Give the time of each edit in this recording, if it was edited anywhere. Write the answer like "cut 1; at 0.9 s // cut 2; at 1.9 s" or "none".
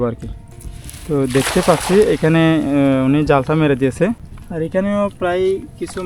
cut 1; at 4.2 s